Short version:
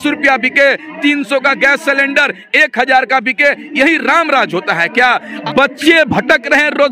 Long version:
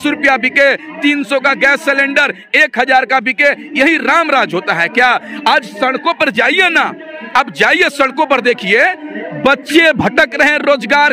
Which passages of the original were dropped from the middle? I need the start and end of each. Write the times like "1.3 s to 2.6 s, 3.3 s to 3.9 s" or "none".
5.3 s to 9.2 s